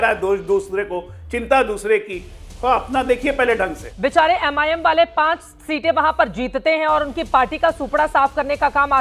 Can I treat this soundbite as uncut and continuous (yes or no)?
no